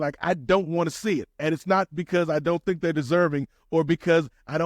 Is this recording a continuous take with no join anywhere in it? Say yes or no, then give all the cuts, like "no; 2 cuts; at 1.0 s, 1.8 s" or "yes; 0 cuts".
yes; 0 cuts